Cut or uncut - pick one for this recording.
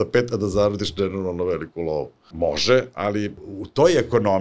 cut